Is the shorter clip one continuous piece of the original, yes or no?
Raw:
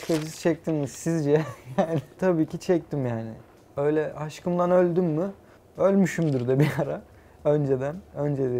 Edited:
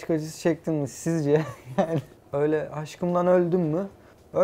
no